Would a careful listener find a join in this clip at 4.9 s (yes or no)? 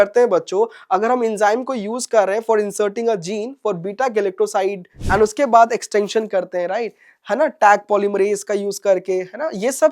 yes